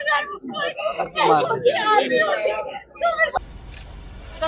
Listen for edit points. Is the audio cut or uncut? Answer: cut